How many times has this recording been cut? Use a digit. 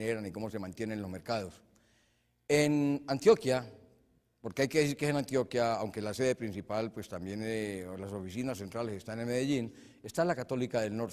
1